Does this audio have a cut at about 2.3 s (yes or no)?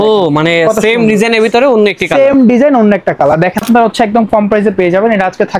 no